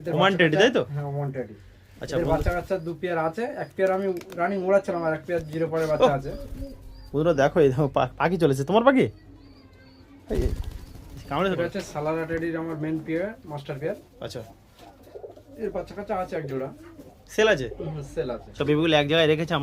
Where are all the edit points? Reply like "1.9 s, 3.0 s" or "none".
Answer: 11.5 s, 18.4 s